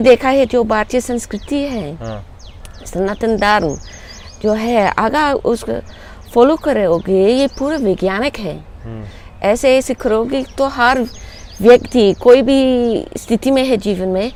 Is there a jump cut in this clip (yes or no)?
no